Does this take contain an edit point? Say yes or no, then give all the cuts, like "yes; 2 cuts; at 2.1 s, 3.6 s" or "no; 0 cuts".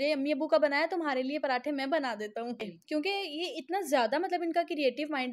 yes; 1 cut; at 2.7 s